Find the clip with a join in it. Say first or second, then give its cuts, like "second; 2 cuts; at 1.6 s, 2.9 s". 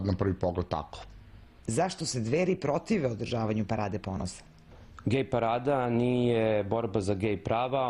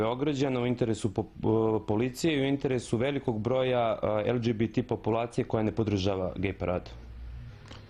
second; 1 cut; at 4.4 s